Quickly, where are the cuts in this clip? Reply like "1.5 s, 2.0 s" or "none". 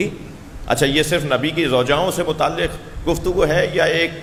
none